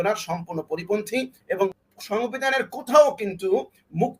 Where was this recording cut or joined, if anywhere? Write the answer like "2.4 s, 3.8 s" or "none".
1.7 s